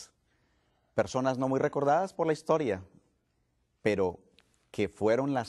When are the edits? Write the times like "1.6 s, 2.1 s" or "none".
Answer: none